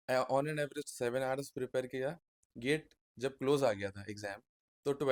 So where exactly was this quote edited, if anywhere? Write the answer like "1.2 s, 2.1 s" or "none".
none